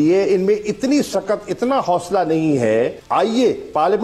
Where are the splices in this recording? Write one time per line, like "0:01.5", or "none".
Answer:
0:03.0